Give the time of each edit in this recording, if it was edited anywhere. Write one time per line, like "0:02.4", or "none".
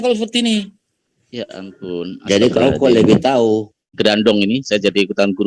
0:03.9